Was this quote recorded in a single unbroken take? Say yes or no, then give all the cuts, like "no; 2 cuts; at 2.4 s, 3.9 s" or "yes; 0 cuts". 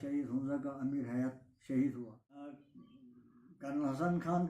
no; 1 cut; at 2.6 s